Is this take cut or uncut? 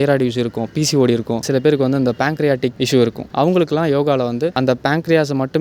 cut